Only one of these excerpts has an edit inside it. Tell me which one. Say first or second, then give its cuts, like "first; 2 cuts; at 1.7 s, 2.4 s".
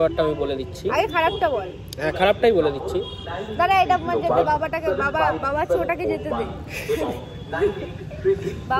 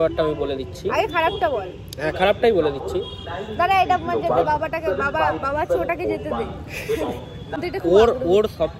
second; 1 cut; at 7.6 s